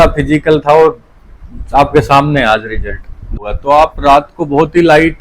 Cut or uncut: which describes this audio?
cut